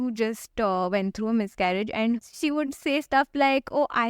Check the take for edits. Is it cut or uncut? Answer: cut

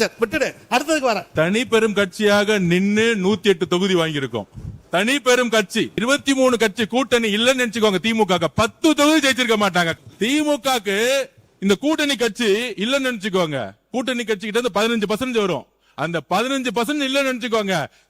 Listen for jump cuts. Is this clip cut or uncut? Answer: cut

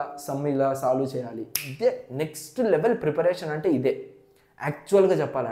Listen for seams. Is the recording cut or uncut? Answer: uncut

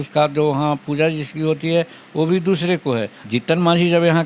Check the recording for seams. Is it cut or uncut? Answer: cut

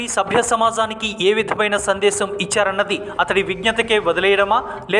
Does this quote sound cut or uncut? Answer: uncut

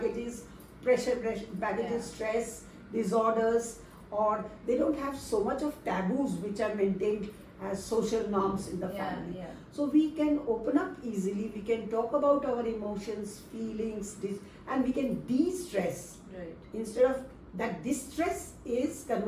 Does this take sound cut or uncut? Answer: uncut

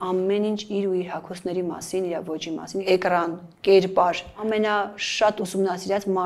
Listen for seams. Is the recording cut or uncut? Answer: cut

